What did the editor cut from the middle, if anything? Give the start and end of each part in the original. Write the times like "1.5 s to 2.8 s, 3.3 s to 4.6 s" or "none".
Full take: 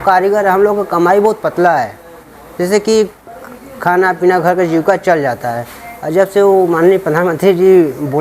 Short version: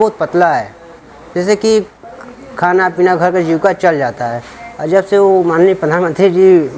none